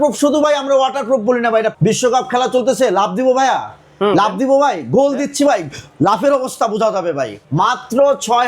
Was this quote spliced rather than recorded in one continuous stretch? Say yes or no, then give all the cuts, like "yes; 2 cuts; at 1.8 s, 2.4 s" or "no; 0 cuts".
yes; 2 cuts; at 1.7 s, 7.4 s